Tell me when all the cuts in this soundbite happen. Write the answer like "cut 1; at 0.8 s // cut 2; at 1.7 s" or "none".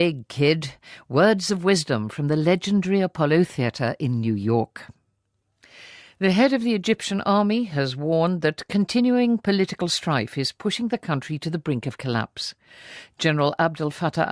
cut 1; at 3.9 s